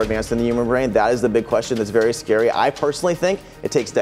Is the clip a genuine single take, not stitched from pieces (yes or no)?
yes